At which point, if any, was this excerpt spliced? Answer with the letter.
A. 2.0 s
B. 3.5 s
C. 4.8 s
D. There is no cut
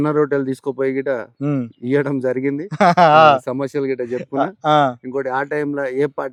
D